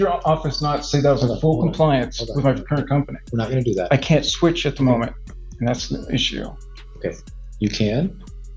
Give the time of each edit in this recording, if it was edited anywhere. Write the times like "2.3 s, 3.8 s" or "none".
none